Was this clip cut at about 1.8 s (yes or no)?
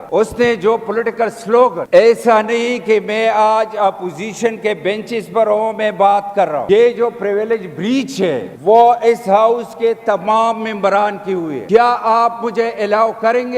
yes